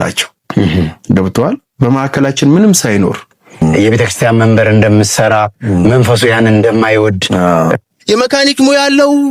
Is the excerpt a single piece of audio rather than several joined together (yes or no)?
no